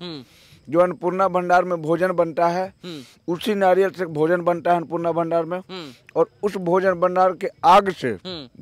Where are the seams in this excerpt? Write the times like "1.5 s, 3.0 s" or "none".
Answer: none